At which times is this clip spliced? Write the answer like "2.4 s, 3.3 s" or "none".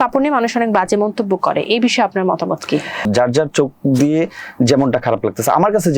3.1 s